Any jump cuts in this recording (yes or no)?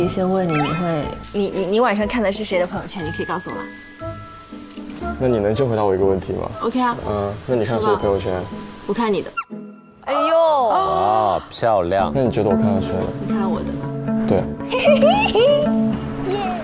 no